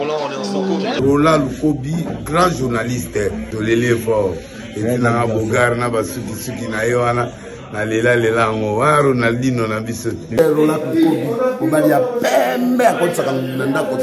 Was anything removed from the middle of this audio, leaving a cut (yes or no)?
no